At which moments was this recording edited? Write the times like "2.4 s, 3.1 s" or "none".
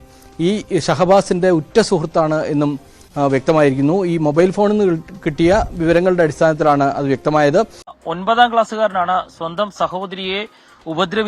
7.9 s